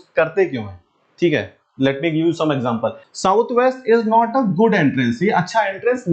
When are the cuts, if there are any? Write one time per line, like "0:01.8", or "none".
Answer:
0:03.0